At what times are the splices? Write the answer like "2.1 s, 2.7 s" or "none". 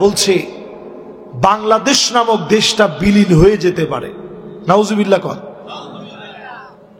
none